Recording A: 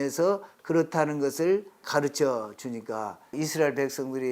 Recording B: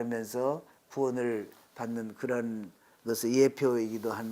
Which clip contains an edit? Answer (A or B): A